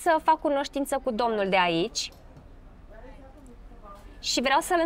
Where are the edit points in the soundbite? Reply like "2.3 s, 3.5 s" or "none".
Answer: none